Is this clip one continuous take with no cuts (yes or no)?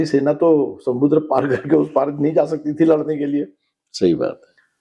yes